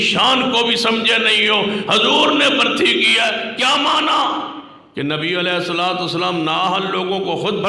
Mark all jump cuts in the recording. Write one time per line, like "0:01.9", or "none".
none